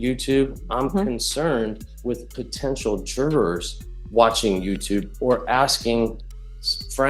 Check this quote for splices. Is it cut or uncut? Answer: cut